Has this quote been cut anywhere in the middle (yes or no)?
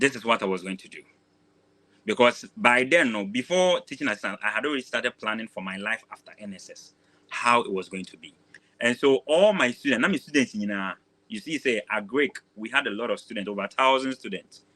yes